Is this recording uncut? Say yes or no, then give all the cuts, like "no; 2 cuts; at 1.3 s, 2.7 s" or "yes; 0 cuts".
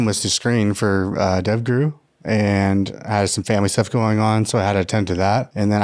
yes; 0 cuts